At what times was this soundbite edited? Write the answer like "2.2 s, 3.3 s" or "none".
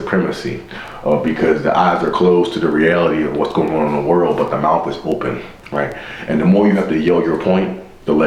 none

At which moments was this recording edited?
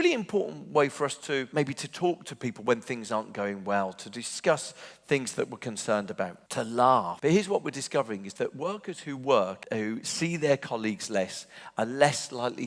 1.5 s, 6.4 s, 7.1 s, 9.6 s

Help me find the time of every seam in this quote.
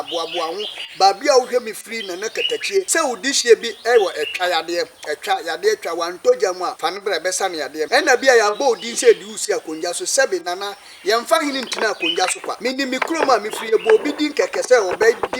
2.9 s, 6.7 s, 7.9 s, 12.6 s

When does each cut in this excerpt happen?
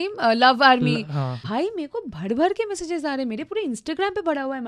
1.5 s

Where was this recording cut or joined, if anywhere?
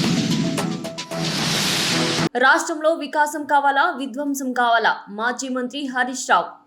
none

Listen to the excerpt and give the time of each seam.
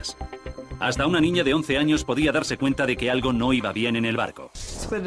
3.6 s

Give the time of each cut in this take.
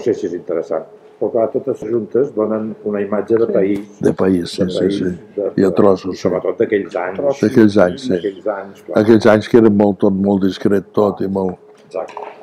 1.9 s

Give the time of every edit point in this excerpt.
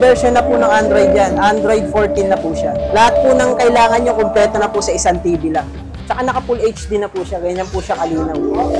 2.9 s, 6.0 s

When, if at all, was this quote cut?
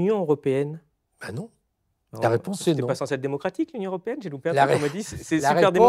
none

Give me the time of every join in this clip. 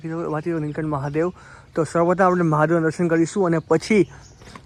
none

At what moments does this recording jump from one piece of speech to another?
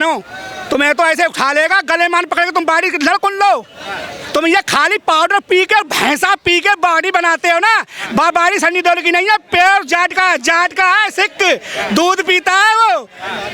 none

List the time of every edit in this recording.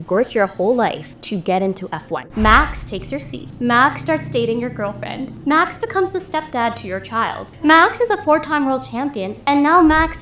1.1 s, 2.2 s, 3.4 s, 5.3 s, 7.5 s

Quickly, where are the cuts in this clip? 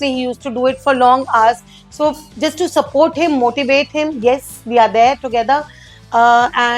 none

